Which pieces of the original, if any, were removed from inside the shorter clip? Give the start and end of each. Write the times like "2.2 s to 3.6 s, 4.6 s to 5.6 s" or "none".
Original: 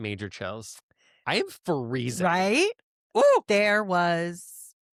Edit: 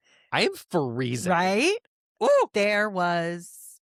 none